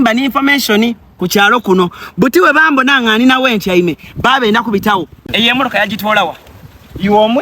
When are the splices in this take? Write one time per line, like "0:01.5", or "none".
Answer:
0:05.2